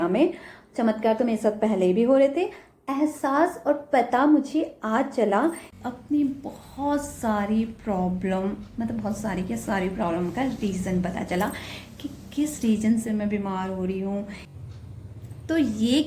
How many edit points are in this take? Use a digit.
2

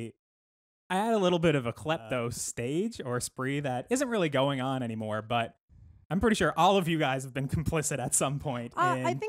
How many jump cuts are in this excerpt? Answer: 1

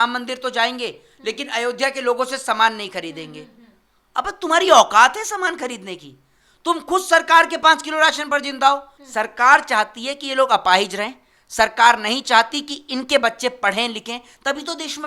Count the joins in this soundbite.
1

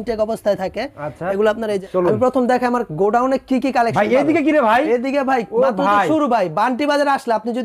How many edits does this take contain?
1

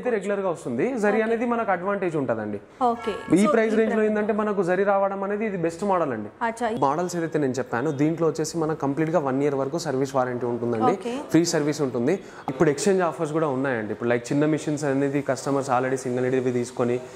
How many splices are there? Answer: 2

